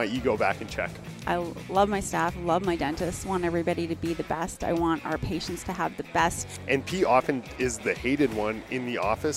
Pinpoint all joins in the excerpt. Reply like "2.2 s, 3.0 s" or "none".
1.2 s, 6.5 s, 7.8 s